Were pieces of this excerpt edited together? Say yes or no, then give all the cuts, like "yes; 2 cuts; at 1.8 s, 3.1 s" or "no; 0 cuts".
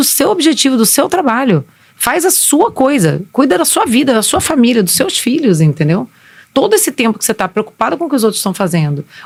no; 0 cuts